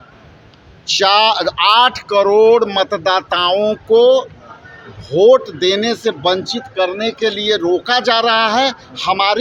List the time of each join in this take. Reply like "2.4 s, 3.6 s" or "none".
none

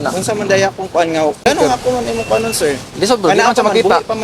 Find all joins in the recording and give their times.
1.4 s

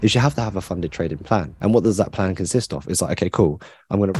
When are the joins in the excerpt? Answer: 1.5 s

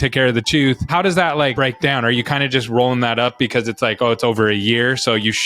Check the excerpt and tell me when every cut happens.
0.9 s, 1.5 s

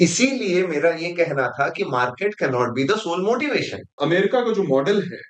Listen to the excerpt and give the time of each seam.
3.9 s

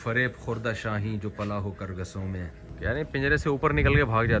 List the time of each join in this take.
2.7 s

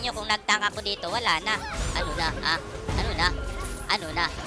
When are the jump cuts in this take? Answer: 1.8 s

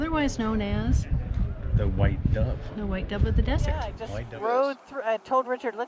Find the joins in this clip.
3.9 s

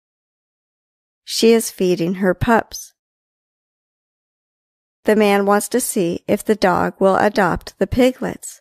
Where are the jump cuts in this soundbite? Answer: 6.6 s

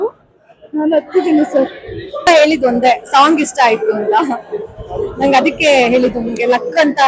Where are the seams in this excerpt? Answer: 2.3 s

